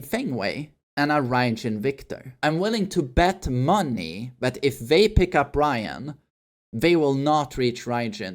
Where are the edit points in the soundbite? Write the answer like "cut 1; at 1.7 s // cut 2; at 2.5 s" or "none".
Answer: cut 1; at 2.4 s

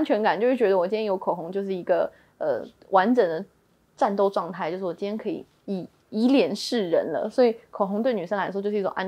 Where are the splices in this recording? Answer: none

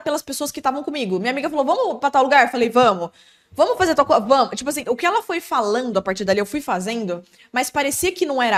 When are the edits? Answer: none

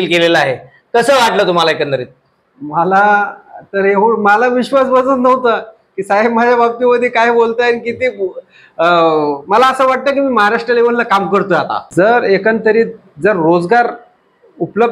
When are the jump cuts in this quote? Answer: cut 1; at 11.9 s

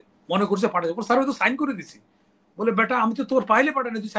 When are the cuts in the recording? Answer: none

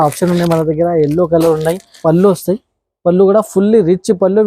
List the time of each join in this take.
cut 1; at 1.9 s

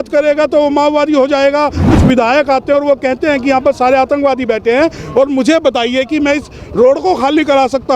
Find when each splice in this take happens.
cut 1; at 1.9 s

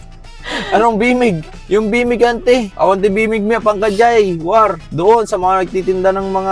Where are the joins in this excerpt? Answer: cut 1; at 1.5 s // cut 2; at 2.7 s

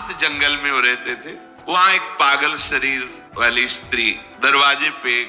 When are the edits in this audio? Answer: cut 1; at 1.7 s // cut 2; at 3.2 s // cut 3; at 4.3 s

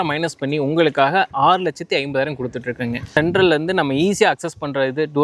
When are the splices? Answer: cut 1; at 3.1 s

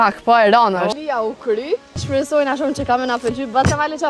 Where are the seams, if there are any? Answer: cut 1; at 0.9 s // cut 2; at 2.0 s

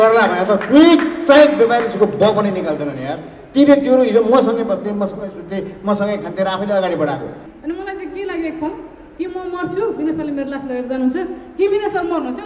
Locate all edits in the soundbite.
cut 1; at 7.5 s

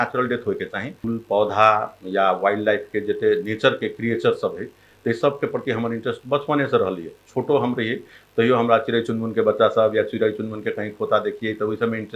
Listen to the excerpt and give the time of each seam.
cut 1; at 1.0 s

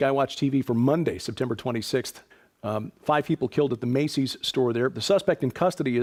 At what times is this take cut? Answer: none

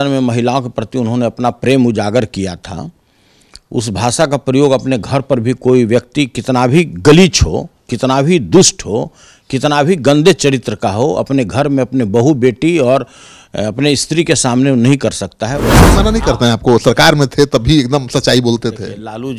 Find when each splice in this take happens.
cut 1; at 15.8 s

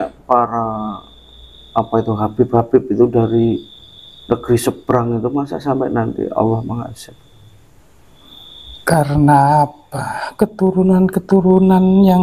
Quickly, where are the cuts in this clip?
cut 1; at 8.7 s

